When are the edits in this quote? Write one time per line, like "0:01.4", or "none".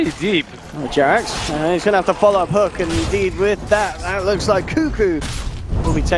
0:03.5